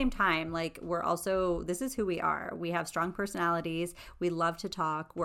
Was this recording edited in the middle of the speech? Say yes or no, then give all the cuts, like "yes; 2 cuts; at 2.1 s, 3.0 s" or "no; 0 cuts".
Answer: no; 0 cuts